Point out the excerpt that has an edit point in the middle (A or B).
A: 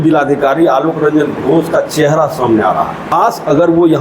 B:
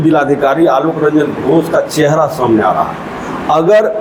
A